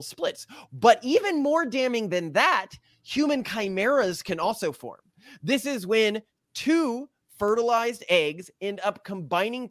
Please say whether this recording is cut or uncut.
uncut